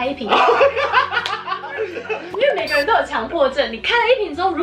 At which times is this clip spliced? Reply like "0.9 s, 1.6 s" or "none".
2.2 s